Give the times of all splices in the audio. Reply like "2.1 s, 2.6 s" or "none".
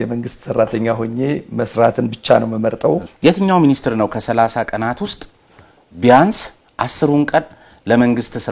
3.1 s